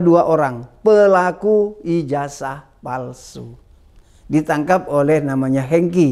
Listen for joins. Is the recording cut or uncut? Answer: uncut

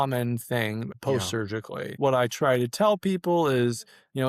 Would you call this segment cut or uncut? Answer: cut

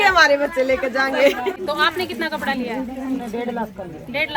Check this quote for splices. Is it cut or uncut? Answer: cut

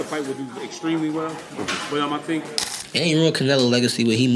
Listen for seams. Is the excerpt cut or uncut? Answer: cut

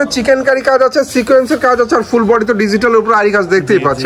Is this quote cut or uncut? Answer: uncut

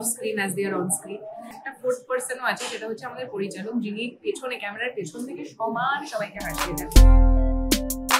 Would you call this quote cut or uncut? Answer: cut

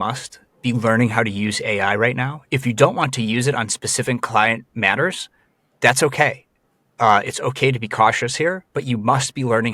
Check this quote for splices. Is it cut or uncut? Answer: cut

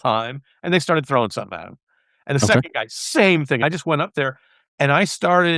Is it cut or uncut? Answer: cut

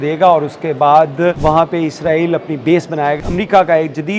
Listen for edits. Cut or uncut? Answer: cut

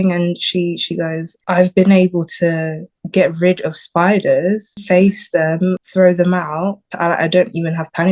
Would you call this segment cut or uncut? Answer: cut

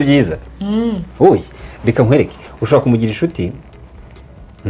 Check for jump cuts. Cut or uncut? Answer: uncut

